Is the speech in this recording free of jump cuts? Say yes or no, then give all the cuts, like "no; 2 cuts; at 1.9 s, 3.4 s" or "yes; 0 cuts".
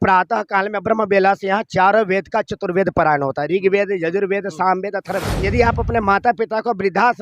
no; 1 cut; at 5.3 s